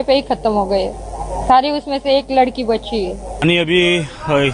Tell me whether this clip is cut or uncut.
cut